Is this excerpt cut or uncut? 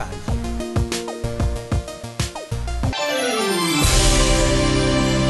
cut